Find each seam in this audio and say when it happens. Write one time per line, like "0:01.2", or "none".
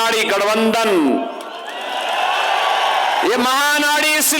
none